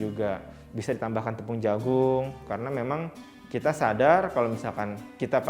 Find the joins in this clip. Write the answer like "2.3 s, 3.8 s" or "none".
2.4 s